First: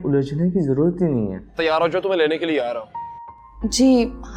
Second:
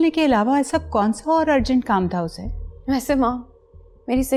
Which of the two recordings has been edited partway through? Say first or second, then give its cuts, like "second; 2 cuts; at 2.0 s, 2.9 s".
first; 1 cut; at 1.4 s